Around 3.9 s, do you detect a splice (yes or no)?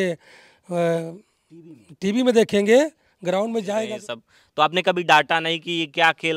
yes